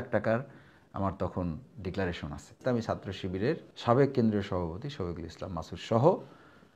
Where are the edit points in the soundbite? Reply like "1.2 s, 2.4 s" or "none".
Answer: 2.6 s, 3.7 s

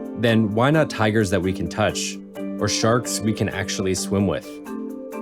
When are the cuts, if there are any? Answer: none

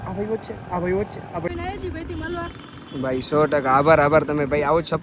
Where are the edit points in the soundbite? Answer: 1.5 s

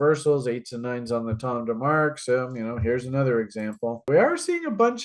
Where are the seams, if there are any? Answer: 4.1 s

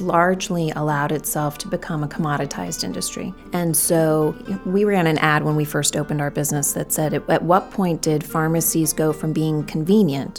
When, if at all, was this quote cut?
3.4 s, 4.5 s

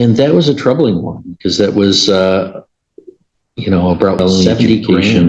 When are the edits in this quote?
none

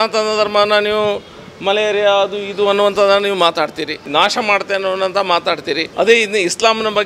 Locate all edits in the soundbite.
4.0 s, 5.9 s

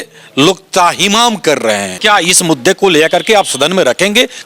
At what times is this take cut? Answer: 1.9 s

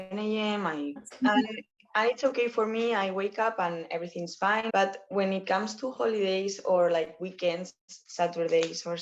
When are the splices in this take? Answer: 1.0 s, 4.7 s

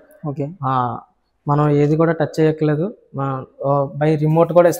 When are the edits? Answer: none

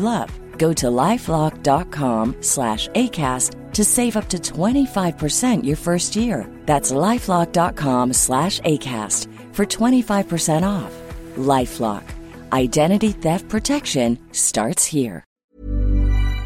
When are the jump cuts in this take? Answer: 15.5 s

